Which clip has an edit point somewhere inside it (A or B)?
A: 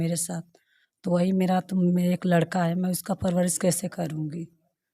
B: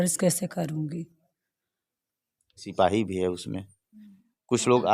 B